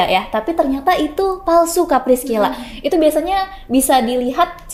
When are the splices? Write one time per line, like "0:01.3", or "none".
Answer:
none